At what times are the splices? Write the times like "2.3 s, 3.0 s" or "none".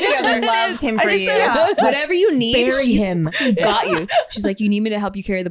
1.8 s